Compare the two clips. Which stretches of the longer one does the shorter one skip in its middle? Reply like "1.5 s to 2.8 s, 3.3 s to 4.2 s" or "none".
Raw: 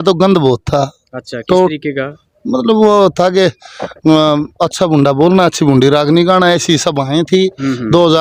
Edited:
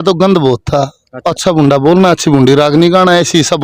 1.2 s to 4.6 s